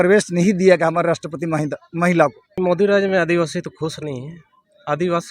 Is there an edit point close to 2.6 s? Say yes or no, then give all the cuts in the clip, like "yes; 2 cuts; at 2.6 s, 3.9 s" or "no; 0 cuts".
yes; 1 cut; at 2.6 s